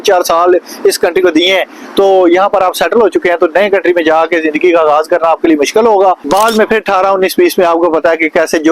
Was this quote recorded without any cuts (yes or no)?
no